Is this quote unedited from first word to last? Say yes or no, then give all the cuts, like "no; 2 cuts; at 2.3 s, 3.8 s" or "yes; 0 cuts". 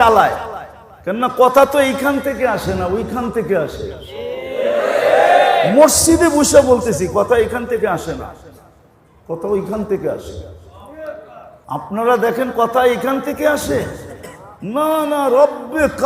no; 1 cut; at 11.5 s